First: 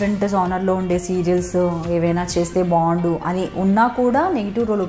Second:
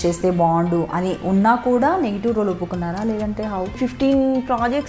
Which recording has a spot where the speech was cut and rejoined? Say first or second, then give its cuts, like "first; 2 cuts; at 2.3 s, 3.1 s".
second; 1 cut; at 3.7 s